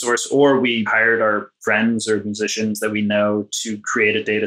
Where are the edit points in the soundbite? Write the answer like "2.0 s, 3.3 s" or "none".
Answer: 0.9 s

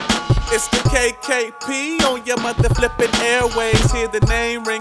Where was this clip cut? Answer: none

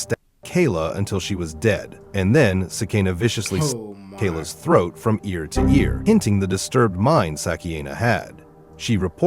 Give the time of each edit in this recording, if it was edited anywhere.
5.9 s

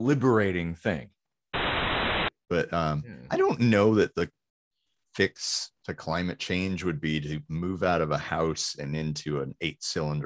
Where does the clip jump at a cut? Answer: 1.8 s

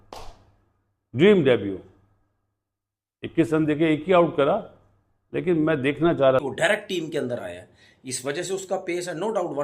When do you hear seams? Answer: 6.4 s

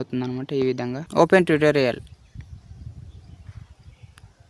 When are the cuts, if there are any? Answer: 1.0 s

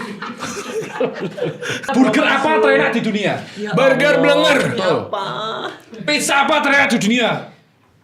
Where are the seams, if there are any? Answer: 1.9 s

